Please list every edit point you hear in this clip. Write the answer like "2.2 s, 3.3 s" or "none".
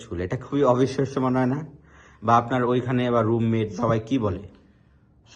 3.8 s